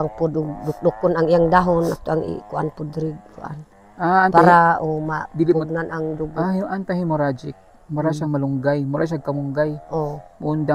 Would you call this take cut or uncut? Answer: uncut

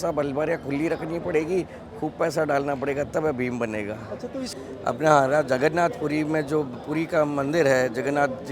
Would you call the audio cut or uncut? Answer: cut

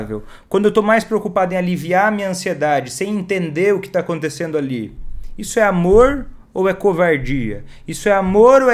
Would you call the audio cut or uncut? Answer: uncut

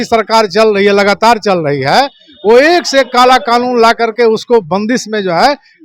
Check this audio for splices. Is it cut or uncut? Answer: uncut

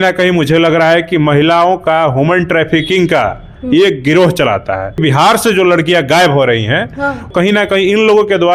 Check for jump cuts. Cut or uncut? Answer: cut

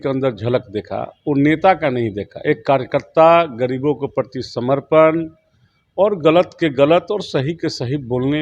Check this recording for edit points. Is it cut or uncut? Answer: uncut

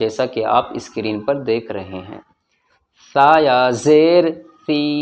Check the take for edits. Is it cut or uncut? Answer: uncut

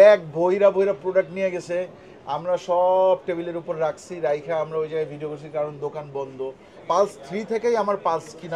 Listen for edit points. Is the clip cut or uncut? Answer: cut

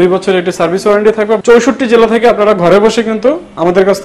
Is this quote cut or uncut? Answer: cut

